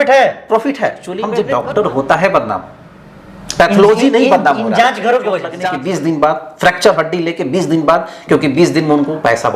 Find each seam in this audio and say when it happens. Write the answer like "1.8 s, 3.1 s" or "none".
1.3 s, 5.6 s